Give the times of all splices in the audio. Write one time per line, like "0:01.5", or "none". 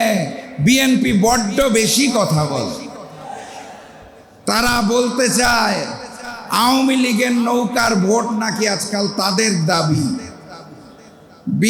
none